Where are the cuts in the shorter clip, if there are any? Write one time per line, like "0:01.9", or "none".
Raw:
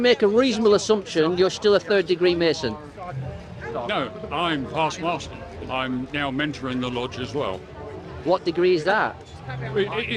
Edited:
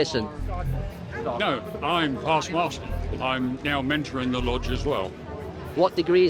none